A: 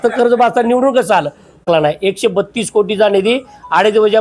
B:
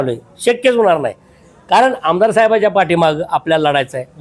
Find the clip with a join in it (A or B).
A